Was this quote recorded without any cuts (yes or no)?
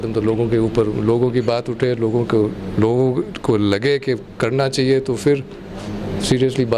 yes